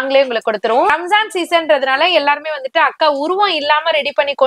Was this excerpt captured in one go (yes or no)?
no